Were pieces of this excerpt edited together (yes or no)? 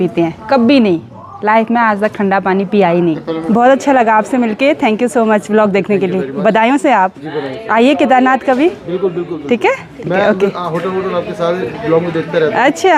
no